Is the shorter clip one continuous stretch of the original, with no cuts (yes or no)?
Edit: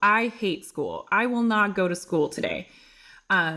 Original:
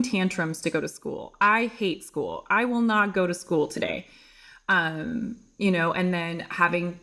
yes